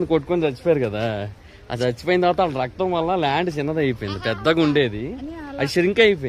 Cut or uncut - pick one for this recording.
uncut